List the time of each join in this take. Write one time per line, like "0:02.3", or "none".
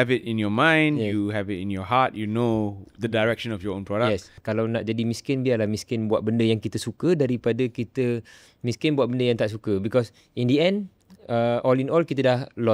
0:04.3